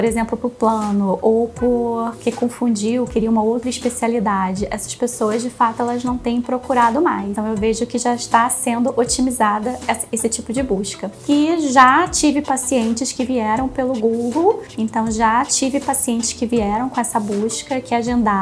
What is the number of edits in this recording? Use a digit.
3